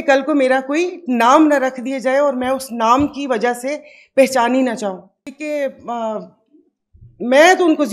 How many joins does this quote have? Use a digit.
1